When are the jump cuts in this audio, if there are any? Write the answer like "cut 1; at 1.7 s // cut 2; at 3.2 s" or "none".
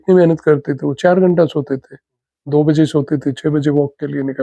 none

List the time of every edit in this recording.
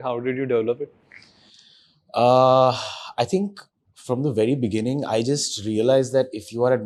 none

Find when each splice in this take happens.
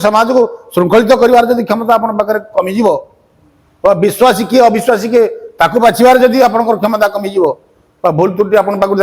none

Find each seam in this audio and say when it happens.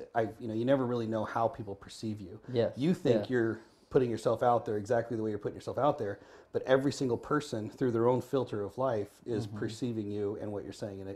none

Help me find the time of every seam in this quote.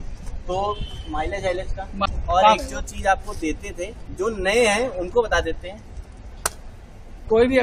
cut 1; at 2.1 s

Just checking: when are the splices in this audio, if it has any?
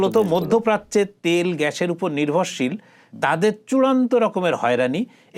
none

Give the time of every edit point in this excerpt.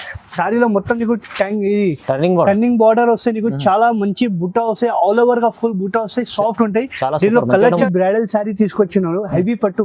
cut 1; at 7.8 s

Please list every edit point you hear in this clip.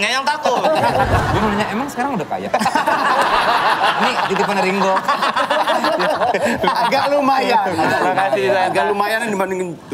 cut 1; at 1.3 s

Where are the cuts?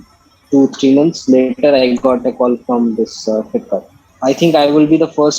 cut 1; at 4.0 s

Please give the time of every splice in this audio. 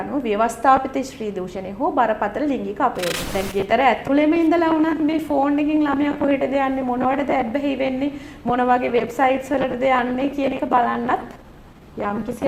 cut 1; at 3.2 s

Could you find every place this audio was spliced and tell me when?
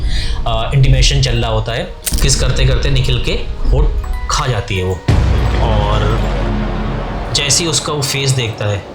cut 1; at 2.1 s

